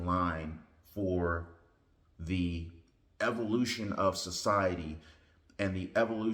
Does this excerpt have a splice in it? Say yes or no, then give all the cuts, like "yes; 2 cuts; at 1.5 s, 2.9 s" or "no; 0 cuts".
no; 0 cuts